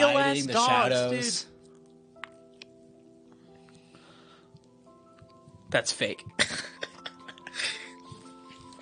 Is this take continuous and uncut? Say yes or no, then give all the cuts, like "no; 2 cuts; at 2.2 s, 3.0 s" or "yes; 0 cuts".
yes; 0 cuts